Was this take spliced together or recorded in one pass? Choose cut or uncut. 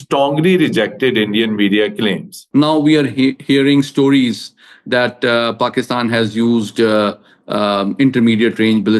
cut